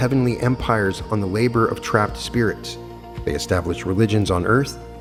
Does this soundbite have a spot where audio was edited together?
no; 0 cuts

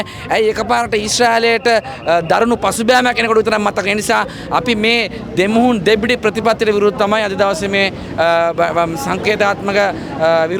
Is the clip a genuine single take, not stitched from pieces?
yes; 0 cuts

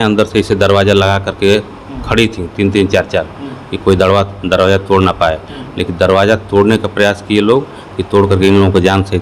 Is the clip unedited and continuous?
yes; 0 cuts

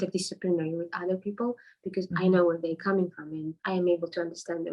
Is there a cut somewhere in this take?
yes; 1 cut; at 3.6 s

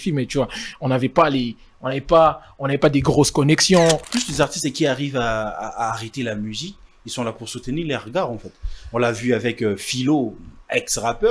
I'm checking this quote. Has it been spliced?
yes; 1 cut; at 4.1 s

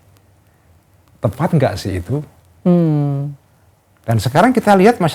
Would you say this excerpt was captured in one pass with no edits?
yes; 0 cuts

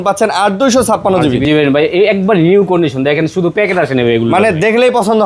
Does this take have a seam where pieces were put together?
yes; 1 cut; at 1.5 s

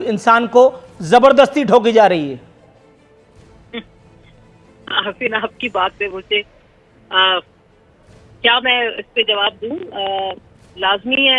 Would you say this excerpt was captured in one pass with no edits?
yes; 0 cuts

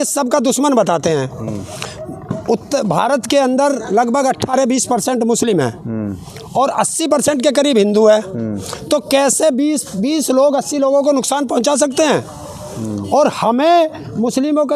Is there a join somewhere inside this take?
no; 0 cuts

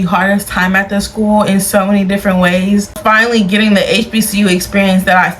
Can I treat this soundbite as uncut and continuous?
no; 1 cut; at 3.0 s

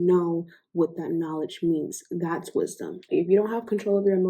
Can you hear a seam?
yes; 1 cut; at 3.0 s

